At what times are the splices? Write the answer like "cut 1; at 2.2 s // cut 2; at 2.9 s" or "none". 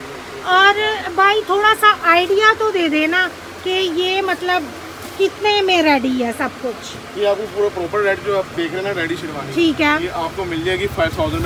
none